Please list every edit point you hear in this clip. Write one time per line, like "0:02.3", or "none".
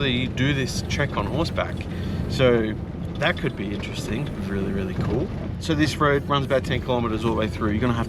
none

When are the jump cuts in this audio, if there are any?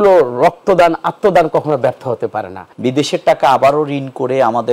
0:02.6

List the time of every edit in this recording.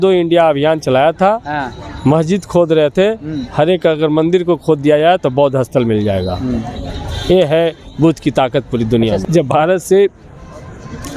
0:09.2

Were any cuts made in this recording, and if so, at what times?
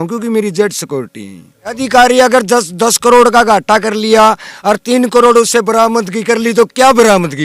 0:01.8

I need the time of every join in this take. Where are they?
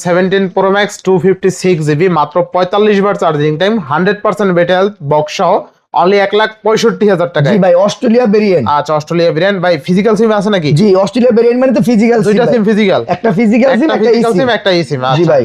none

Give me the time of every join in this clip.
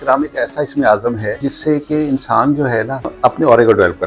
0:01.5
0:03.1

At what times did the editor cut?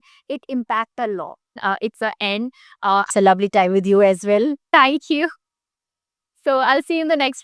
none

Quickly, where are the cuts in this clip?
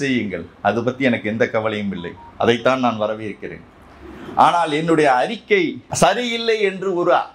0:05.8

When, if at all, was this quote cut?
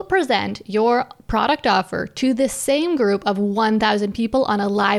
none

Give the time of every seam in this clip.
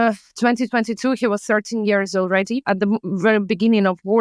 0:02.6

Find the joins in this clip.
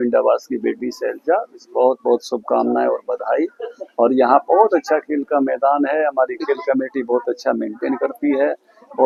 none

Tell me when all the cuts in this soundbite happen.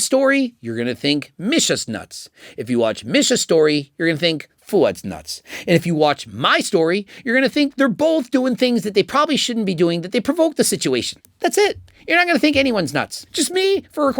0:11.2

